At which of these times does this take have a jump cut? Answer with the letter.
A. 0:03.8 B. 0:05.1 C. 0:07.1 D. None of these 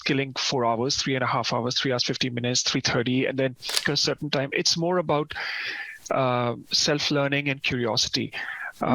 A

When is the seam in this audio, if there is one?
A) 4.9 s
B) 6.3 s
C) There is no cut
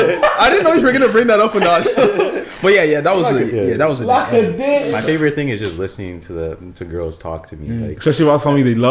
A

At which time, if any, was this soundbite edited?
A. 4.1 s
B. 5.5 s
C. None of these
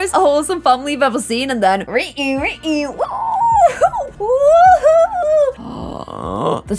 B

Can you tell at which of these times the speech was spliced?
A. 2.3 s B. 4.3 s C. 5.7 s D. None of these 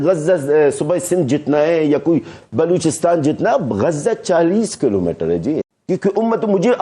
C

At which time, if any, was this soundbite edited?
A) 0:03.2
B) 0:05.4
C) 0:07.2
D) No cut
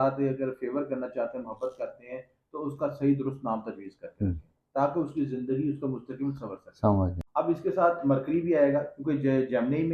C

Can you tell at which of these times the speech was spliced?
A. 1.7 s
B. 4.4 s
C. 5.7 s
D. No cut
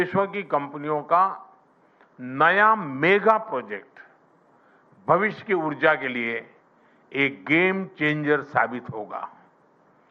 C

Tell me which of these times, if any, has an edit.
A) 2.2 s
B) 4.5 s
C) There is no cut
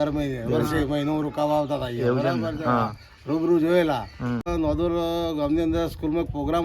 B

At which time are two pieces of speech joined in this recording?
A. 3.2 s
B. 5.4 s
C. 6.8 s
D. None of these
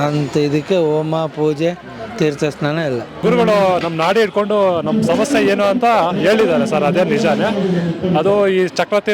A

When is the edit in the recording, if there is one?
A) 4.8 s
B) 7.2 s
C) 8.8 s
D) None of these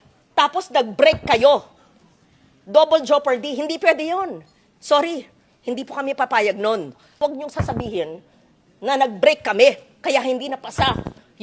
B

